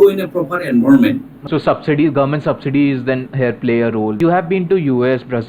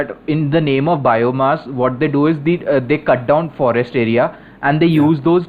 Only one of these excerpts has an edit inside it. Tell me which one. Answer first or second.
first